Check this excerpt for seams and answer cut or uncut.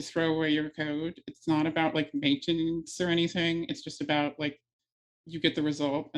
uncut